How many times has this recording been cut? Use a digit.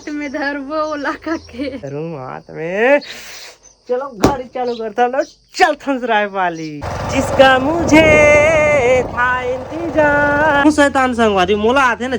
2